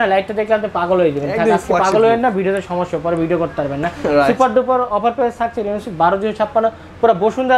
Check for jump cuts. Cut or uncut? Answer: uncut